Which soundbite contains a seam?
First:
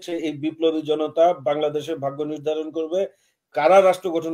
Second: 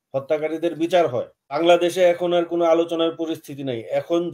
second; 1 cut; at 1.6 s

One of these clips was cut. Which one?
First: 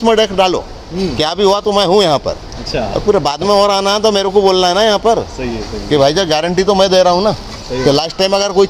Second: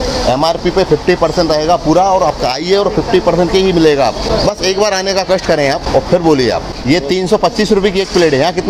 second; 3 cuts; at 4.3 s, 5.8 s, 6.7 s

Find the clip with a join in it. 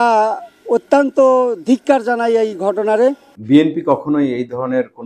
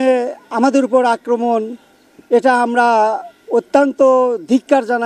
first; 1 cut; at 3.3 s

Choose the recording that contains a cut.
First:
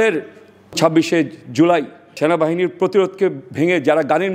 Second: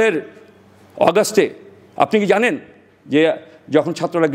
first; 2 cuts; at 0.8 s, 2.2 s

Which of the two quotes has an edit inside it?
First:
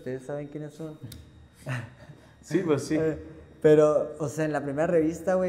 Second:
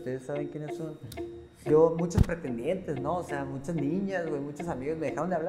second; 1 cut; at 1.6 s

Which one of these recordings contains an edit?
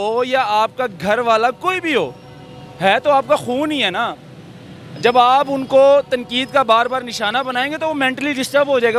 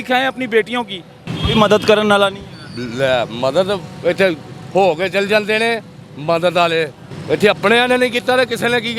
second; 2 cuts; at 1.3 s, 7.1 s

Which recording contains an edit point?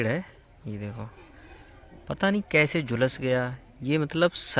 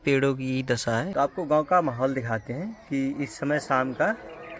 second; 1 cut; at 1.1 s

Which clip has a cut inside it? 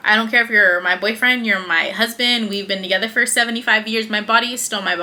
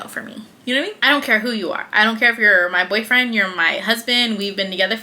second; 1 cut; at 1.0 s

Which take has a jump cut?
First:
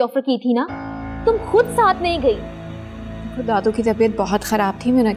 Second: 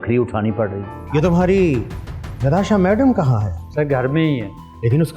second; 1 cut; at 0.9 s

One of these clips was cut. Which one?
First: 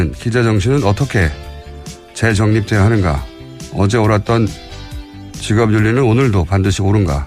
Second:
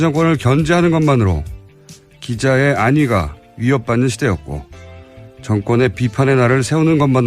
second; 1 cut; at 3.3 s

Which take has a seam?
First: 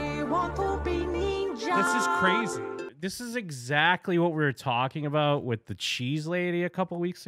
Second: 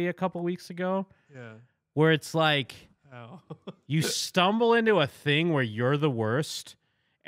first; 1 cut; at 2.8 s

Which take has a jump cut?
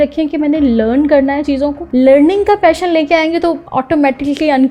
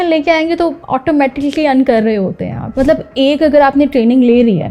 second; 1 cut; at 3.0 s

